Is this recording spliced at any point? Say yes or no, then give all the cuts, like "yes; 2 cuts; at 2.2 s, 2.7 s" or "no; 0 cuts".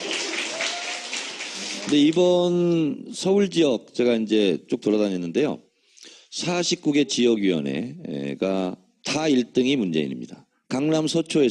yes; 1 cut; at 2.0 s